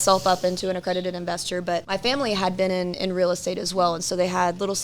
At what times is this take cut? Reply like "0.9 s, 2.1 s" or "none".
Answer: 1.9 s

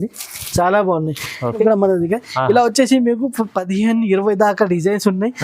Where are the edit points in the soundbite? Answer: 1.6 s

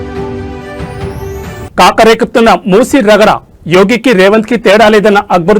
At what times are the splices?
1.7 s

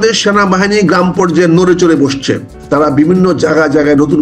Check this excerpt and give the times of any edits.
2.5 s

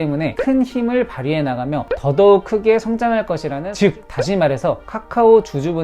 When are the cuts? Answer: 3.6 s

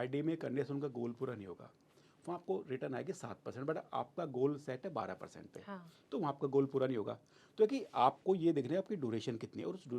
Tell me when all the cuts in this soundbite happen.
none

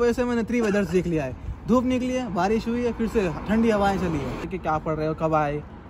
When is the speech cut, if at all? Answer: 4.4 s

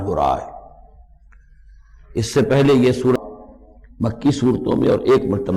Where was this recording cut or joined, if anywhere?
3.1 s

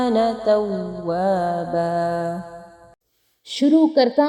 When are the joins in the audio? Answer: none

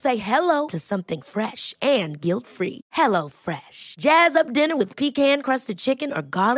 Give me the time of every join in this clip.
none

